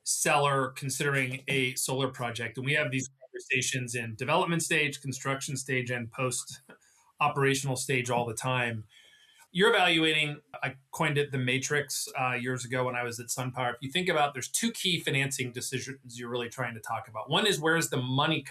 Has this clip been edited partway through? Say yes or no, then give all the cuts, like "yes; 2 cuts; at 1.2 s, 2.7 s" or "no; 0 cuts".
yes; 2 cuts; at 9.3 s, 10.6 s